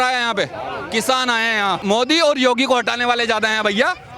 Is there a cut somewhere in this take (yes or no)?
yes